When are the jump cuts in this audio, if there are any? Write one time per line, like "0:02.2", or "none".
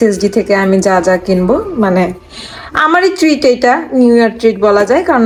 none